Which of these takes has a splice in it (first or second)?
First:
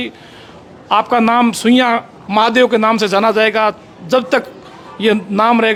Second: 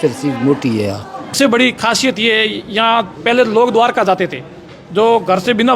second